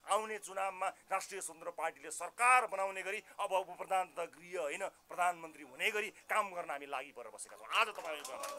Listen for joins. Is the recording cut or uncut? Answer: uncut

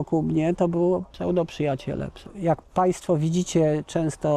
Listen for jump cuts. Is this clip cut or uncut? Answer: cut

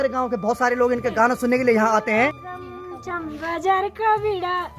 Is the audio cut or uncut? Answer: cut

